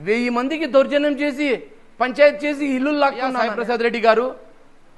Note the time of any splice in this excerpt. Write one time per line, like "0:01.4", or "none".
0:03.4